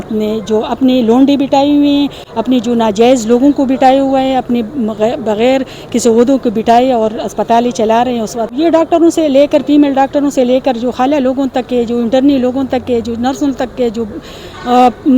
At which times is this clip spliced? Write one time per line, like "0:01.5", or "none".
0:08.5